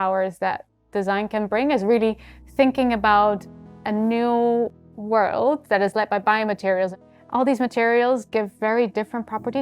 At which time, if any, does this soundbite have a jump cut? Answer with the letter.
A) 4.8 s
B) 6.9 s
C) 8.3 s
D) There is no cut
B